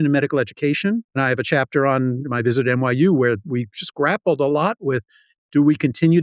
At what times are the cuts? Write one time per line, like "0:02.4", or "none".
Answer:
0:01.2